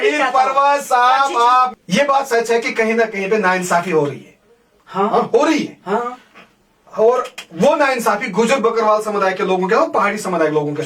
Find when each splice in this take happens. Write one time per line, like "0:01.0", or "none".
0:01.7